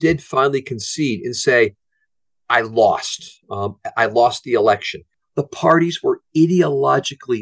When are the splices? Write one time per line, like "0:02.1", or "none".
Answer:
0:05.2